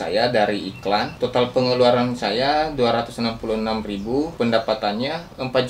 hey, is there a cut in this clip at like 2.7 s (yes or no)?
no